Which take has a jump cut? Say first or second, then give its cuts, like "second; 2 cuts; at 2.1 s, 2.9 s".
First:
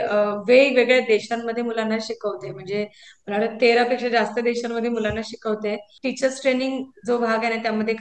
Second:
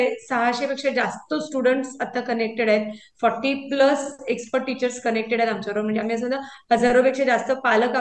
first; 1 cut; at 6.0 s